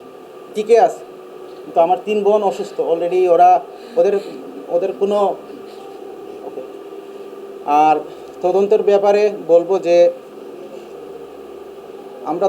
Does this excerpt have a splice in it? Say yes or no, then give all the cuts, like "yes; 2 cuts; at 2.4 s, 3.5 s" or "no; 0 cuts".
no; 0 cuts